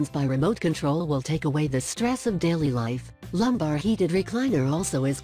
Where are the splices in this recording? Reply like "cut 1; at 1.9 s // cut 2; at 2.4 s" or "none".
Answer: none